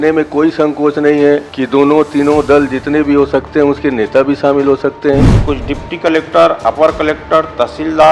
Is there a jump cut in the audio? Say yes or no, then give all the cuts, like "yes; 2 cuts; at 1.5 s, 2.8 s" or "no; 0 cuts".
yes; 2 cuts; at 1.5 s, 5.3 s